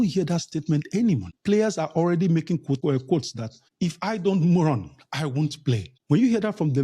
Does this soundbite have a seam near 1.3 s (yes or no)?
yes